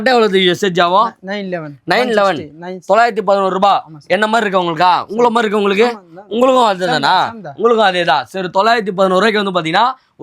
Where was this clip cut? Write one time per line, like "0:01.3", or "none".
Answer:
none

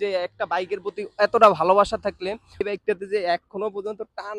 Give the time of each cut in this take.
0:02.6

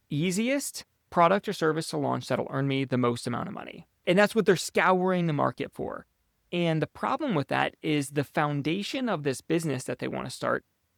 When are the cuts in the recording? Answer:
none

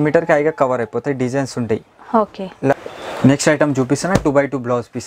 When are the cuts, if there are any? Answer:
0:02.7

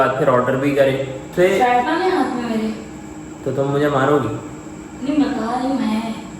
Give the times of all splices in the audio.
0:01.3

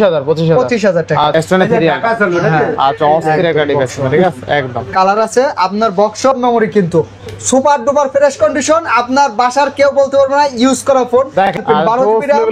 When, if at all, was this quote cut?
0:01.3
0:06.2
0:11.6

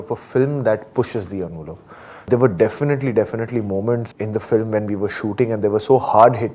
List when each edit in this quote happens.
0:02.3
0:04.1

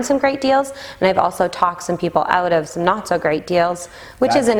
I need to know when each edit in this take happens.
none

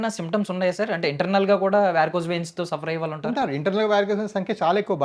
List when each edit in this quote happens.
none

